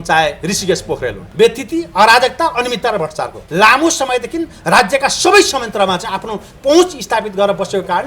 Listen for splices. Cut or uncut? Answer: cut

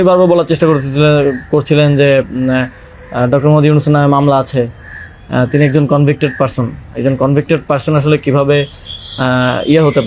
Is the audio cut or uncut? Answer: uncut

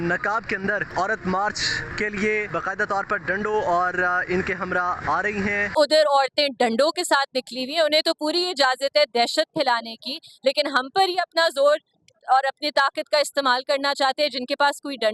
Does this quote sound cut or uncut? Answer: cut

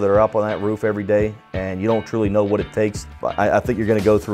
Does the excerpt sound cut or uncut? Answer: cut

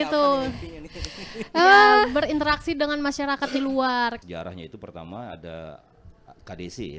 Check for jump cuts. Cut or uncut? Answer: cut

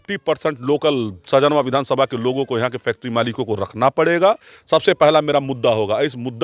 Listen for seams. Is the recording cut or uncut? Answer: cut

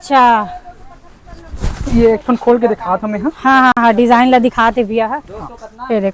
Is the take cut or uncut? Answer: uncut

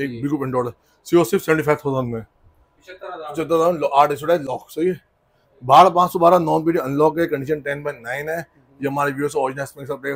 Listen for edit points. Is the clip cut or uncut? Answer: uncut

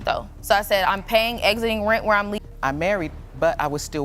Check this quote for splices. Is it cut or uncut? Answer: cut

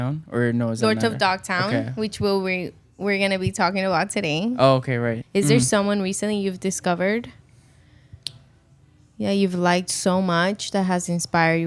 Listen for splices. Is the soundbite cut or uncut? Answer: cut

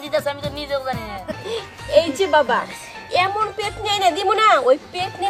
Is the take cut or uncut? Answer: cut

